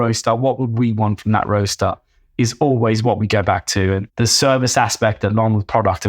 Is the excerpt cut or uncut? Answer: cut